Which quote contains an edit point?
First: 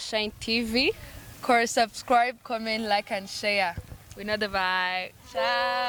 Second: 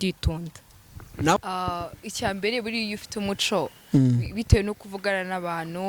second; 1 cut; at 1.4 s

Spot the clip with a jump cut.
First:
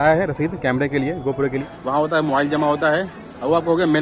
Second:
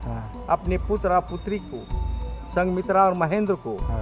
first; 1 cut; at 1.7 s

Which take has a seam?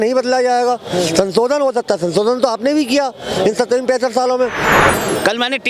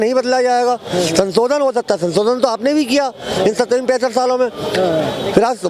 first; 1 cut; at 4.7 s

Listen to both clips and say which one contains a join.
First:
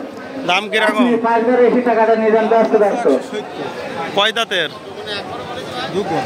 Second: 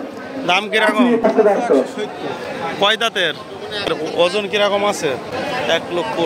second; 3 cuts; at 1.2 s, 3.9 s, 5.3 s

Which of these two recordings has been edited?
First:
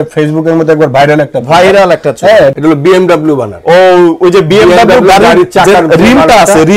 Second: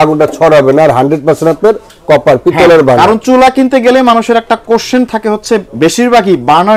first; 1 cut; at 2.6 s

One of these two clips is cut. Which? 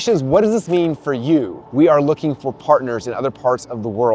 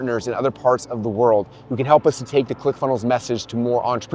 first; 1 cut; at 1.6 s

